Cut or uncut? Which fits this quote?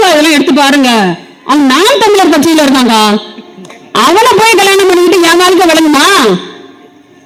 uncut